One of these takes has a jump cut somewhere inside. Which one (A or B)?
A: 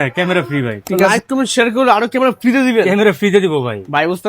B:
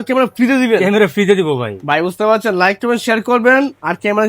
A